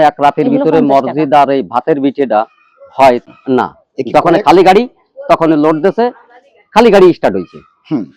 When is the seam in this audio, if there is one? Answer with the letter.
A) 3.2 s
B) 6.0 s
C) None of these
A